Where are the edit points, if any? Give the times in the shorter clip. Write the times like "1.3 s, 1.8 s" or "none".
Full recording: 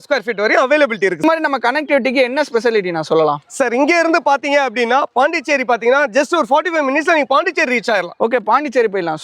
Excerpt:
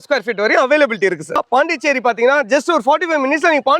1.2 s